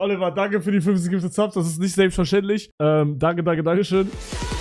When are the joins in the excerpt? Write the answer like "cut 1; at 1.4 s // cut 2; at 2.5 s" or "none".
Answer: none